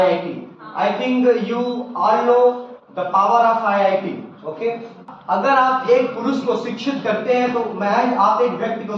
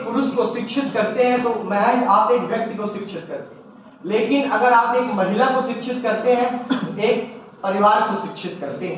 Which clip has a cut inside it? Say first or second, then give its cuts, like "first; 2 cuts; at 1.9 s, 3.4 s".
first; 1 cut; at 5.1 s